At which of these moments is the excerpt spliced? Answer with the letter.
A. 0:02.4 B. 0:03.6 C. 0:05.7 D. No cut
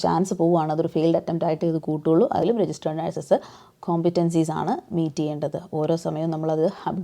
A